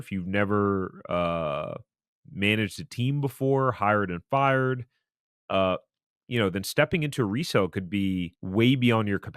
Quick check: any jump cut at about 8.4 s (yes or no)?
yes